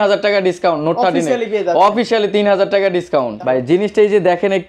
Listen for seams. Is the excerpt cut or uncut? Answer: cut